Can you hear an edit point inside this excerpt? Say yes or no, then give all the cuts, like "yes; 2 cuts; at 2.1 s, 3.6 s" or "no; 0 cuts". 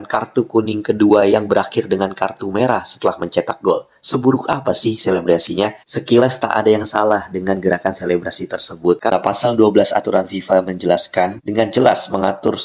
yes; 1 cut; at 9.1 s